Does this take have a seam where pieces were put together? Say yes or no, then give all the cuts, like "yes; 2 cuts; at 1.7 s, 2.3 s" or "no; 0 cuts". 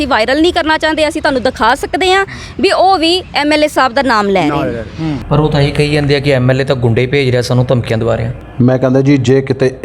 yes; 1 cut; at 5.2 s